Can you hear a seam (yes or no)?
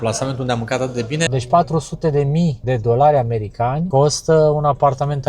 yes